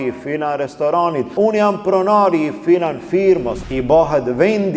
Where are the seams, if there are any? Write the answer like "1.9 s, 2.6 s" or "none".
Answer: 1.3 s, 3.6 s